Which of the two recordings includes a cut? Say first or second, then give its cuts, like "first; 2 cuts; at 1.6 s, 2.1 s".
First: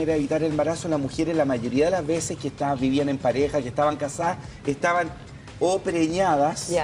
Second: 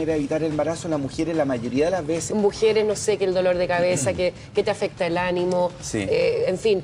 first; 1 cut; at 2.3 s